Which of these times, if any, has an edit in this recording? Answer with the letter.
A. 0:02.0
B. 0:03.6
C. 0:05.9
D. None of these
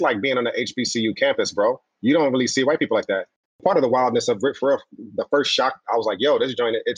B